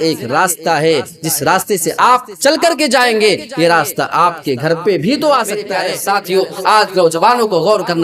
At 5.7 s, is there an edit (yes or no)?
yes